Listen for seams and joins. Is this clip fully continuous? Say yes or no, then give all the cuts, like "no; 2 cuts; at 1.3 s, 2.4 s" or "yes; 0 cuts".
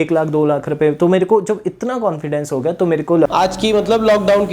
no; 1 cut; at 3.3 s